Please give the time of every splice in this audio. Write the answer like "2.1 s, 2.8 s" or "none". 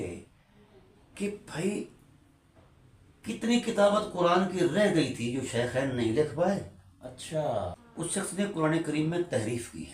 7.8 s